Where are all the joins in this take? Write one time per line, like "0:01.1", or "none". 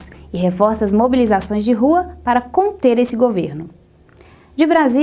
0:04.0